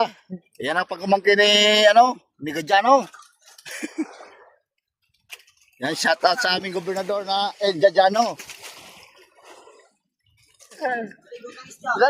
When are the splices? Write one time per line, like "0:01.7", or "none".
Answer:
0:10.8